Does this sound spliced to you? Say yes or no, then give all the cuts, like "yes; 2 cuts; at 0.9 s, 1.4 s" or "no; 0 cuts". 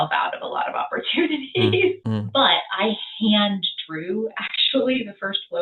yes; 1 cut; at 2.0 s